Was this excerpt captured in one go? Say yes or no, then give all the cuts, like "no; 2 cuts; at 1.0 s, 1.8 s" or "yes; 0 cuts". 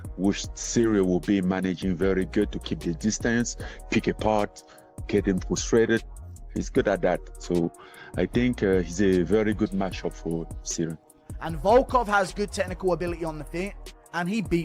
no; 2 cuts; at 8.2 s, 11.2 s